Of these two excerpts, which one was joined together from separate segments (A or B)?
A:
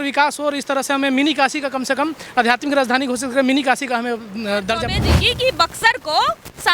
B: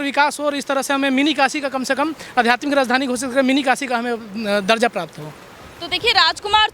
A